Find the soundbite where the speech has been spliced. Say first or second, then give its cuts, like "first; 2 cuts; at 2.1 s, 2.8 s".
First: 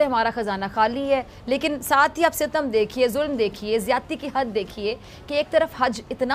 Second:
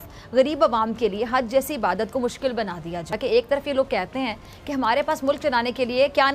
second; 1 cut; at 3.1 s